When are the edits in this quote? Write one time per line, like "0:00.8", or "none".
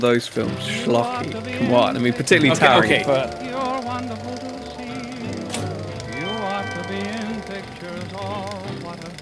0:03.2